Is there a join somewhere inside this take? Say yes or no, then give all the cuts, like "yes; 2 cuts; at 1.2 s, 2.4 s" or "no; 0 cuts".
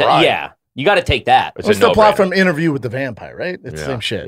no; 0 cuts